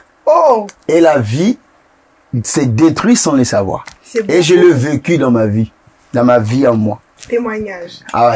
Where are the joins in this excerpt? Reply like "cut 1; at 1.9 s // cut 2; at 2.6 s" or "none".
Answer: none